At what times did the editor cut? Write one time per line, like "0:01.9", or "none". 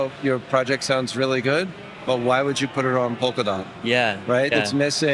none